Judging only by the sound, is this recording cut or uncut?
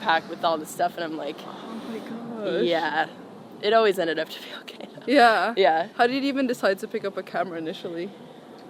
uncut